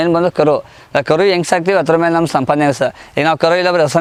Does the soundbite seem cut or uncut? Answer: uncut